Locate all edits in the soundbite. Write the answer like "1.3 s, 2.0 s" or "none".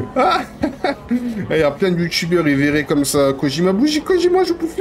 none

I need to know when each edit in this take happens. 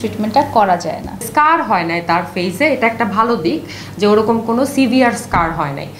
1.3 s

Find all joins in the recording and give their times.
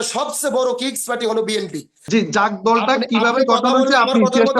2.0 s

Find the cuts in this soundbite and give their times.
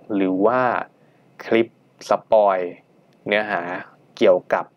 none

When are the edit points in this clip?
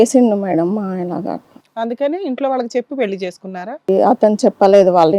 3.9 s

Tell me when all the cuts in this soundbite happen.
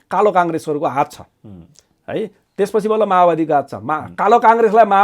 none

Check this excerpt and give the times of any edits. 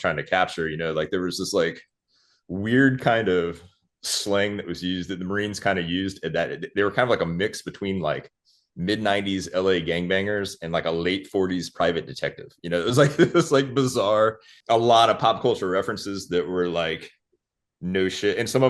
14.5 s

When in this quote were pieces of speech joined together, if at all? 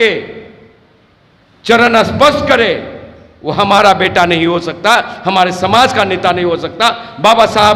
none

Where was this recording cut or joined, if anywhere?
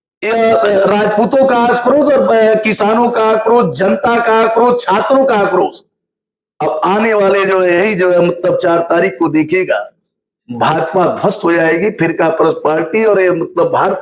none

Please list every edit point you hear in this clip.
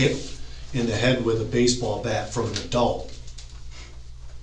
none

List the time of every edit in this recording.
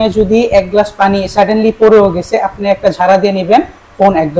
none

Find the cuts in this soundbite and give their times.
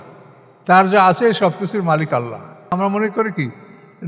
2.7 s

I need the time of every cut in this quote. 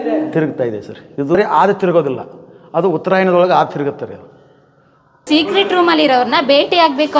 5.2 s

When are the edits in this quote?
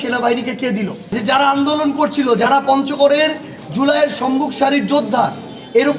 1.0 s

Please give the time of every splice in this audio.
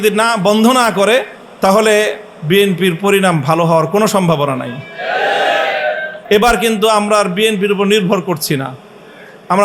1.4 s, 6.1 s

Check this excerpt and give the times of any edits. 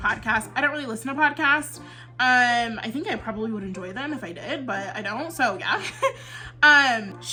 none

